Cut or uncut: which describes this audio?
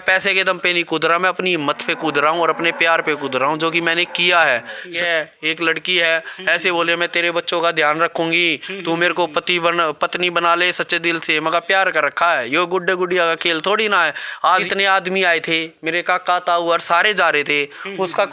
cut